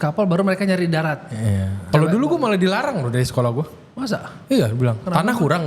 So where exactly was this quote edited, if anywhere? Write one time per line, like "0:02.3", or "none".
0:01.8